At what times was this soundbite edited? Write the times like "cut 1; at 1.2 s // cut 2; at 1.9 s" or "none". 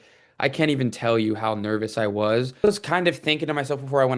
cut 1; at 2.6 s